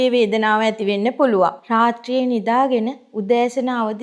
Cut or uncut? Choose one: cut